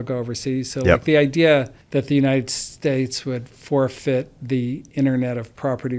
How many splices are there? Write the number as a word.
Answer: one